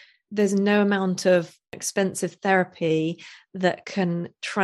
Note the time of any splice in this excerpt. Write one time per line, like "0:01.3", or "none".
0:01.8